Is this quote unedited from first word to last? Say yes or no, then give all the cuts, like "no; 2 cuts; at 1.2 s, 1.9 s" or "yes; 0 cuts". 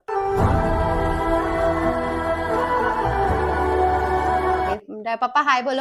no; 1 cut; at 4.7 s